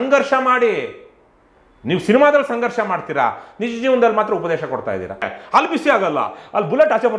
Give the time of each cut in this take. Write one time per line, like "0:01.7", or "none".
0:05.4